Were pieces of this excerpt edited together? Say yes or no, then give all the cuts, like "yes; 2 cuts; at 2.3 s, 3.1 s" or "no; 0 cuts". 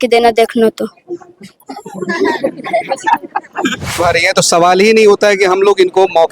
yes; 1 cut; at 4.0 s